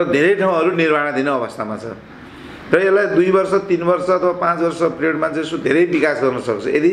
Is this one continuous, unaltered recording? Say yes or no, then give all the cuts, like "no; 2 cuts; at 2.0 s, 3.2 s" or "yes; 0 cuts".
yes; 0 cuts